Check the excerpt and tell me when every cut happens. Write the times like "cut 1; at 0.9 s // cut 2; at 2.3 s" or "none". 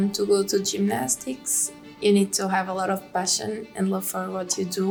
none